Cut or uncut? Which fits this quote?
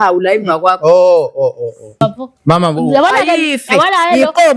cut